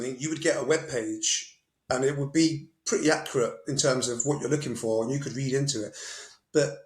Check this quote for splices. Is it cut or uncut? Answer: uncut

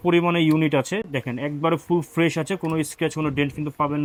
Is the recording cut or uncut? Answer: uncut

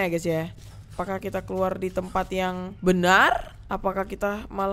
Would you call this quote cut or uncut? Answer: cut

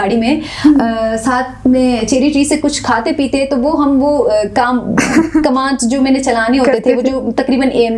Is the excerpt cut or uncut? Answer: uncut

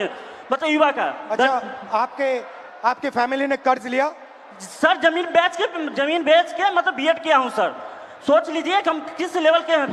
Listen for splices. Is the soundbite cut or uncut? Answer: uncut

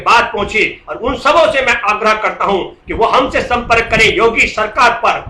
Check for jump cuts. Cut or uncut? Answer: uncut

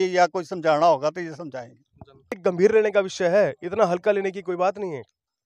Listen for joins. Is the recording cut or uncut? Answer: cut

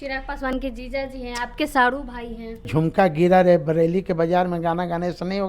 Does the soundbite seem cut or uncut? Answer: cut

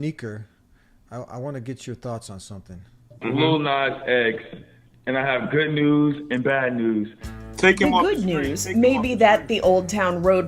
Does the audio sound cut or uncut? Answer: uncut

